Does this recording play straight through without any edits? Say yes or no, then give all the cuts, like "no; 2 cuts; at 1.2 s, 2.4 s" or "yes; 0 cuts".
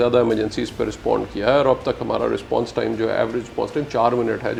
yes; 0 cuts